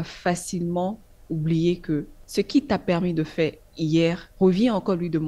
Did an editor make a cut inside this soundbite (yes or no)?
yes